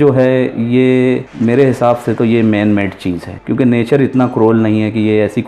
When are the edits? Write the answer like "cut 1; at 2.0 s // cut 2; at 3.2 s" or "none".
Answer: cut 1; at 1.3 s // cut 2; at 3.3 s